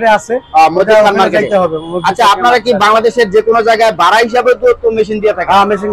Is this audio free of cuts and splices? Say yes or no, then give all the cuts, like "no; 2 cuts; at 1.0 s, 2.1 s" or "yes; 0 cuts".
yes; 0 cuts